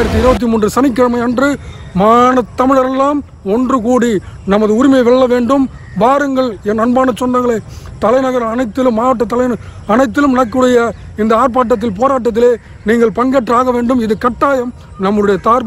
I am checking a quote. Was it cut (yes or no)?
no